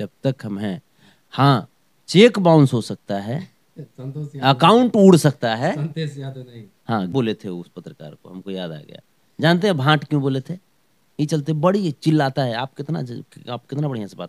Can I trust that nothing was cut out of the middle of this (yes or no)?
no